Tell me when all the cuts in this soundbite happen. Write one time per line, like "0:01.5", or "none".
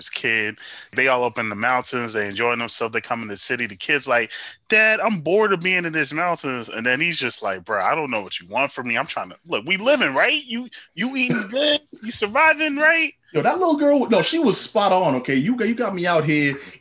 0:00.9